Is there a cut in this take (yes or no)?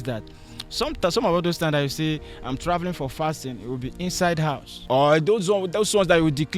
yes